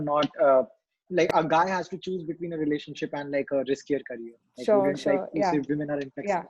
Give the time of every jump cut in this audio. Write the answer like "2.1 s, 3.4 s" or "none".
1.0 s